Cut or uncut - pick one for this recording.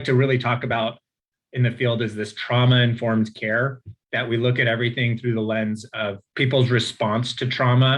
cut